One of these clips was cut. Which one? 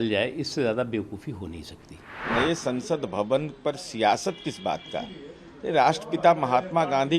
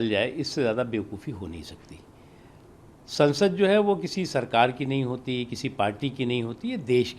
first; 1 cut; at 2.2 s

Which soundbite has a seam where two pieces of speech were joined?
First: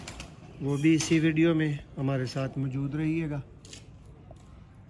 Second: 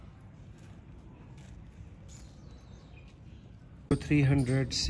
second; 1 cut; at 3.9 s

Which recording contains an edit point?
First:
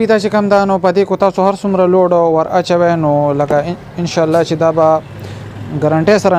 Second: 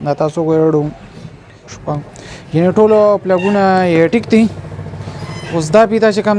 second; 1 cut; at 1.7 s

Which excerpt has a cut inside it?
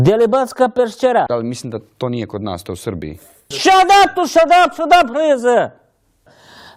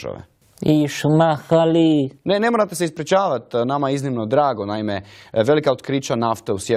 first; 1 cut; at 1.6 s

